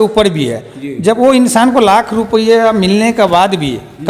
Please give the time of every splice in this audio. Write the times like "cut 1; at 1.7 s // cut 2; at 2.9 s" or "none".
none